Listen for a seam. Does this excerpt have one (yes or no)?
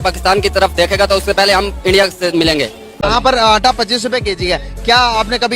yes